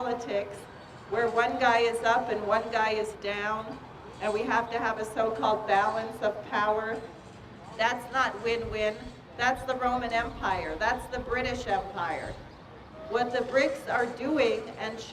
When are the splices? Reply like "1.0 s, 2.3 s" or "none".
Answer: 8.1 s